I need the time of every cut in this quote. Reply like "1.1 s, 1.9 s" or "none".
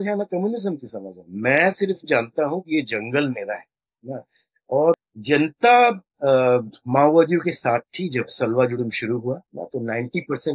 5.1 s